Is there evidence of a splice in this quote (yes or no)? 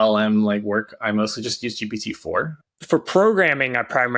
yes